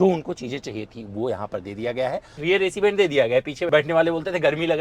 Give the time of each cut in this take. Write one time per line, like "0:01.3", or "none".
0:02.4
0:03.6